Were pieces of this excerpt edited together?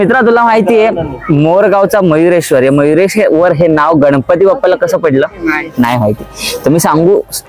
no; 0 cuts

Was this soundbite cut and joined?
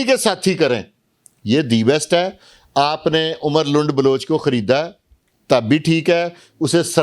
no; 0 cuts

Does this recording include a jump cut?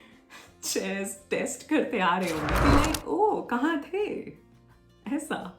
yes; 1 cut; at 2.6 s

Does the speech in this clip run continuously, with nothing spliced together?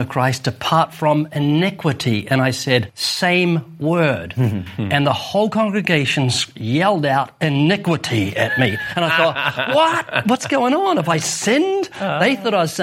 no; 1 cut; at 3.0 s

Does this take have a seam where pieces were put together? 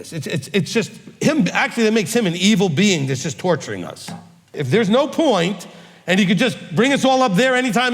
yes; 1 cut; at 4.5 s

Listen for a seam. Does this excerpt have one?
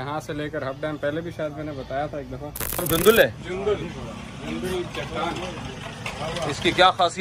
yes; 1 cut; at 2.8 s

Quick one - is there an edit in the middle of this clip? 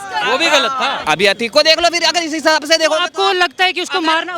yes; 1 cut; at 1.0 s

